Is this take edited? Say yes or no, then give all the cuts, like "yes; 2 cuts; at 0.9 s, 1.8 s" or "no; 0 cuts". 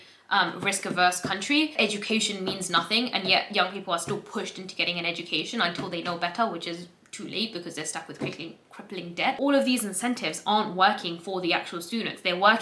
yes; 2 cuts; at 1.7 s, 9.4 s